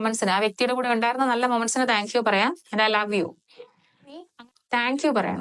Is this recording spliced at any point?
yes; 1 cut; at 4.3 s

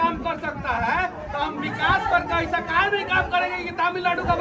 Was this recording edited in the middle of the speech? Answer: no; 0 cuts

